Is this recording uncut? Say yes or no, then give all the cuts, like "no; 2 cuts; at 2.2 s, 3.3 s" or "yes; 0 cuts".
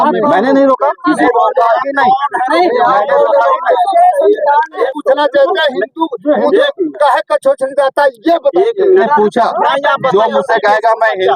no; 3 cuts; at 1.2 s, 4.8 s, 9.0 s